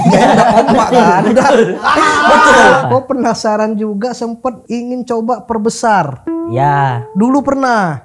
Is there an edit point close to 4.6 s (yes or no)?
yes